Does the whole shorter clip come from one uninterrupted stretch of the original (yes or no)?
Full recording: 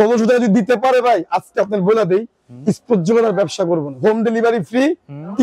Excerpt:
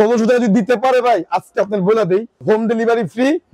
no